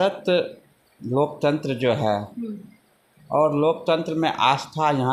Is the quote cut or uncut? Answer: uncut